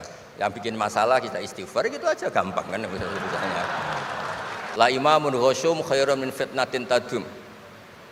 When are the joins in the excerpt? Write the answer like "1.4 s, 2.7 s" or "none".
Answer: 4.6 s